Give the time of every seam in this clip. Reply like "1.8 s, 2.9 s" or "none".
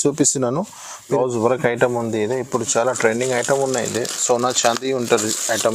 1.0 s

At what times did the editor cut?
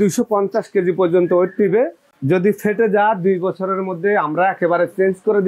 none

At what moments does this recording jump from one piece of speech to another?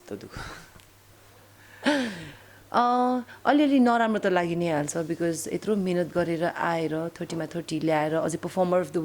none

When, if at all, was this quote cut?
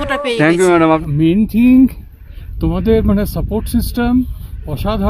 1.0 s

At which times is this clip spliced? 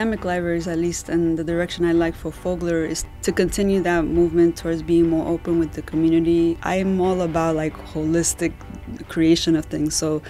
3.0 s, 6.6 s

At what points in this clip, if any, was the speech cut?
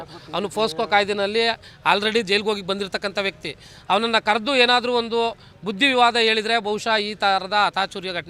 none

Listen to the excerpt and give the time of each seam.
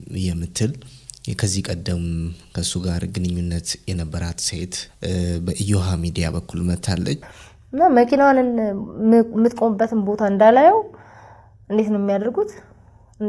4.8 s, 7.3 s

